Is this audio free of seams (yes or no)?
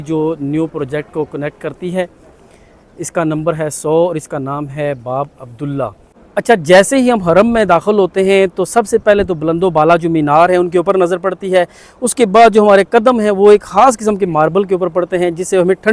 yes